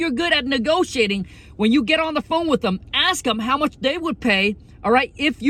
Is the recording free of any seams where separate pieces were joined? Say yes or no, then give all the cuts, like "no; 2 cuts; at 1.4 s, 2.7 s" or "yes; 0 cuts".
yes; 0 cuts